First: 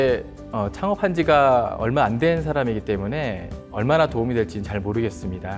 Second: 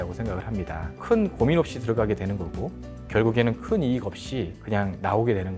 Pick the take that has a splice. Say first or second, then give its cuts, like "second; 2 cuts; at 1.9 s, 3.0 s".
second; 2 cuts; at 0.9 s, 4.6 s